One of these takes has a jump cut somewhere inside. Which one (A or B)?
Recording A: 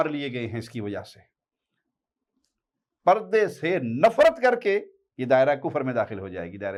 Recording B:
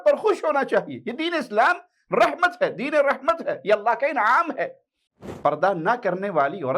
B